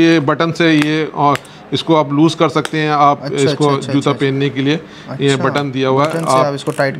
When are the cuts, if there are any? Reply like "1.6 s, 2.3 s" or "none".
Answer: none